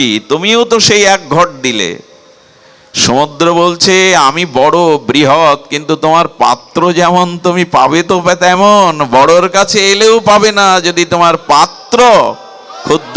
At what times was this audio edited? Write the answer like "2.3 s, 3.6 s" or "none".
none